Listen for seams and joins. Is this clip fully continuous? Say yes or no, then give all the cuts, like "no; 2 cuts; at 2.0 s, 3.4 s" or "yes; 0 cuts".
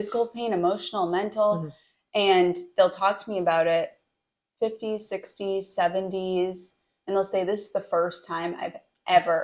yes; 0 cuts